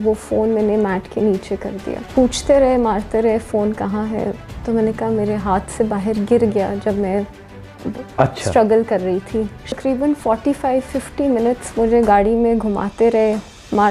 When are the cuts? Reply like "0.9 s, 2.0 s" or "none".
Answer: 1.9 s, 9.7 s